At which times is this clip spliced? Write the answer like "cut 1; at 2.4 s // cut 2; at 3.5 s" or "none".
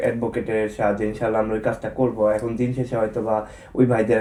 none